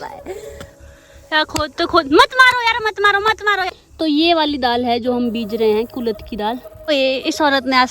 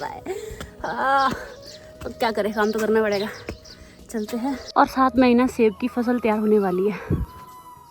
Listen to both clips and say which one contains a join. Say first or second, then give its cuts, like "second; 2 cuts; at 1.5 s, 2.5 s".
first; 3 cuts; at 0.8 s, 3.7 s, 6.9 s